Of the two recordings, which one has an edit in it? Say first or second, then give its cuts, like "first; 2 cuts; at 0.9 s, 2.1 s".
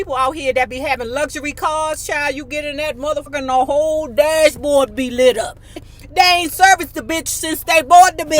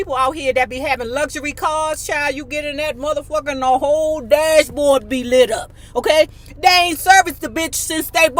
first; 2 cuts; at 3.3 s, 5.8 s